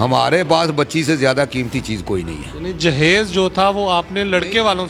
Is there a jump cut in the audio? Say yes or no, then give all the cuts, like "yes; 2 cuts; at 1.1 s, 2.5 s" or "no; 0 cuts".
no; 0 cuts